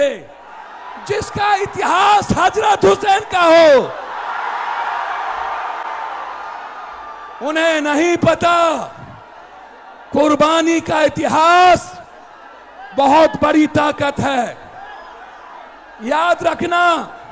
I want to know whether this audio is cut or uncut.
uncut